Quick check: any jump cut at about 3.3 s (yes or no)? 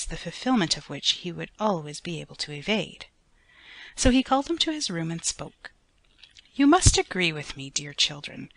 no